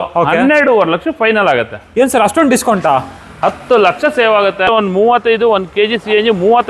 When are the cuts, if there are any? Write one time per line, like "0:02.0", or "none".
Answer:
0:04.7